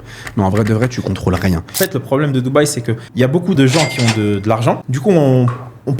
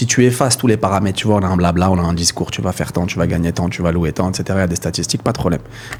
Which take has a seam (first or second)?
first